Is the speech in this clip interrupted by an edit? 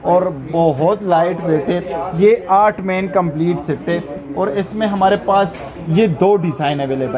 no; 0 cuts

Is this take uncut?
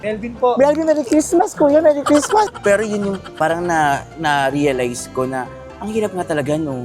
no; 1 cut; at 2.5 s

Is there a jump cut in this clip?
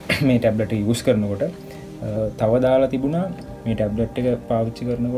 yes; 1 cut; at 2.2 s

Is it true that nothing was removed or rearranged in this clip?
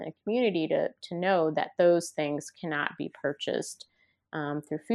yes; 0 cuts

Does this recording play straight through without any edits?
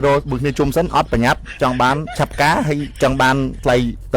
no; 1 cut; at 2.1 s

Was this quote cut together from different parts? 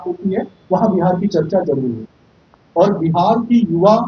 no; 0 cuts

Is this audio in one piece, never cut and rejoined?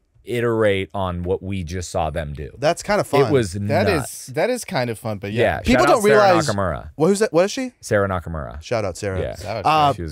yes; 0 cuts

